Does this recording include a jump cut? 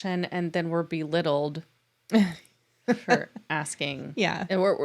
no; 0 cuts

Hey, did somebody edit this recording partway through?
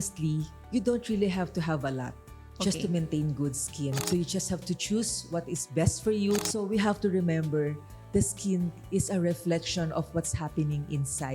yes; 2 cuts; at 4.0 s, 6.4 s

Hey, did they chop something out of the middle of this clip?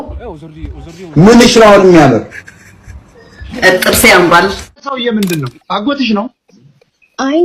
yes; 1 cut; at 4.9 s

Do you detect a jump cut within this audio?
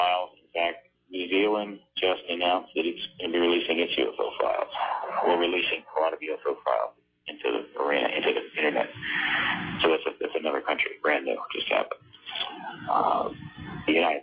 no; 0 cuts

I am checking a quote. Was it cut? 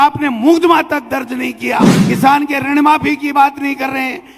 yes; 1 cut; at 2.0 s

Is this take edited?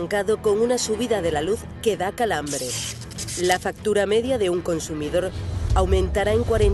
no; 0 cuts

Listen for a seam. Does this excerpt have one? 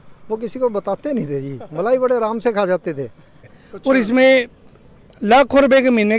yes; 1 cut; at 3.6 s

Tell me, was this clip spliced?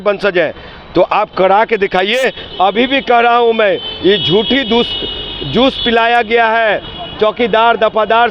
no; 0 cuts

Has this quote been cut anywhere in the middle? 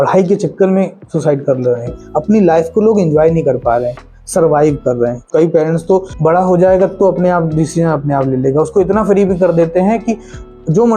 yes; 3 cuts; at 2.0 s, 5.2 s, 6.1 s

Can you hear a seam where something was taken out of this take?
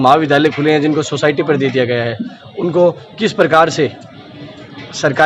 no; 0 cuts

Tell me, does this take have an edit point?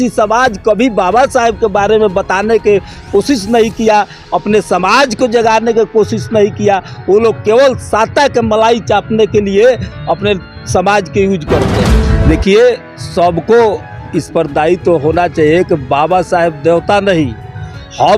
yes; 1 cut; at 12.0 s

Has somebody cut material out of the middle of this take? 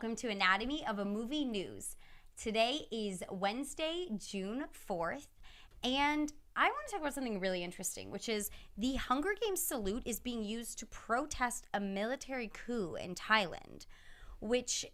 no; 0 cuts

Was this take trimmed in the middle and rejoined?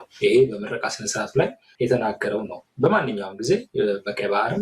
yes; 1 cut; at 1.6 s

